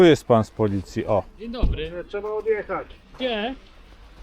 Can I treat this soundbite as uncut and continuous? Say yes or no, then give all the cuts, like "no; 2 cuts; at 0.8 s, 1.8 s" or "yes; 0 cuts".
no; 2 cuts; at 1.4 s, 3.0 s